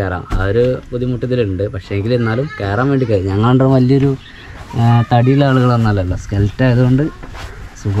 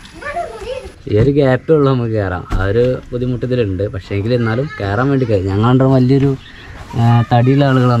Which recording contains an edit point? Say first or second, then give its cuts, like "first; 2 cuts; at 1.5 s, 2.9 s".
second; 1 cut; at 0.9 s